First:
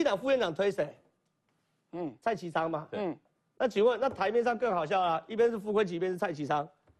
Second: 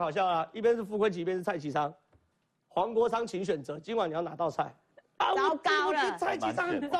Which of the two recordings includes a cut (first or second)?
second